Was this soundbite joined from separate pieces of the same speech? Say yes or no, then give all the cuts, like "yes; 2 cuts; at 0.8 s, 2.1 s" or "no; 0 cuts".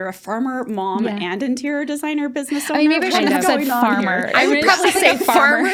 no; 0 cuts